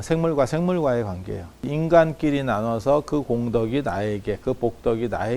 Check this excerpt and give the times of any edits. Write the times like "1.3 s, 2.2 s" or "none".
1.7 s